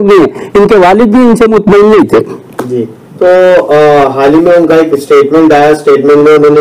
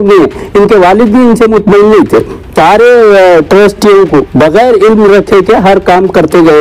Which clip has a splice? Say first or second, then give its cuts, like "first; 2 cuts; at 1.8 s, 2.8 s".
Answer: second; 2 cuts; at 2.5 s, 4.3 s